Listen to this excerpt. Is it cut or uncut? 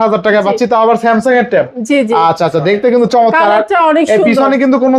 uncut